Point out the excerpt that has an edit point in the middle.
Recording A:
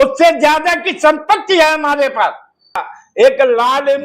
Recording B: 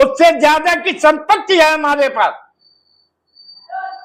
A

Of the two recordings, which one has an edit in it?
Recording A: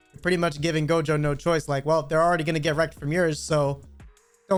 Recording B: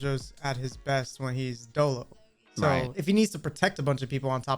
B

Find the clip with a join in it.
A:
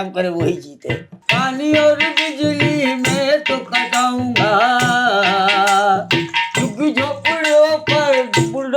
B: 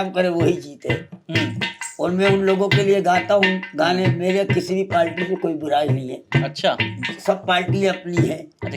A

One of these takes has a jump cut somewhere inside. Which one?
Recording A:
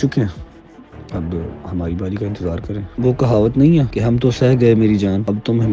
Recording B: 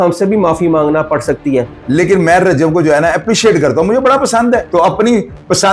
B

